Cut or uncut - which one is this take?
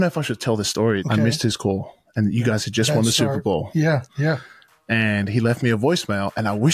cut